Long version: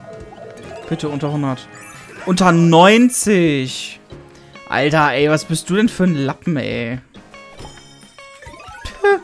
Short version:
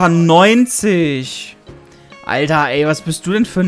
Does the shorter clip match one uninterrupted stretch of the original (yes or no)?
yes